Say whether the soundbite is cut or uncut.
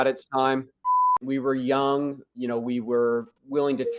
cut